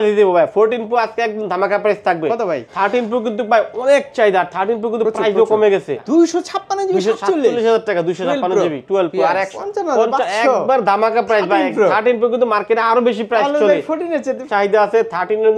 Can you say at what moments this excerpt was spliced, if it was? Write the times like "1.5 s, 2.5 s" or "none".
2.7 s, 6.0 s, 9.5 s, 14.4 s